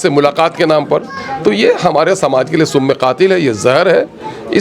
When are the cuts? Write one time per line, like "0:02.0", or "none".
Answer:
none